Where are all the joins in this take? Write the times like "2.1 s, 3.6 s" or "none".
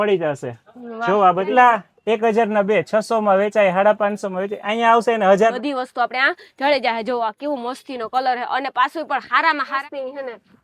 1.5 s, 5.5 s, 9.8 s